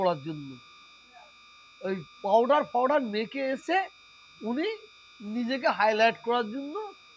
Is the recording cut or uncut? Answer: uncut